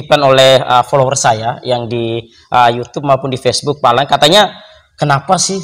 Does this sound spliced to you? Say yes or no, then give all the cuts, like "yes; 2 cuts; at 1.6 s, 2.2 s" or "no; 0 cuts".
no; 0 cuts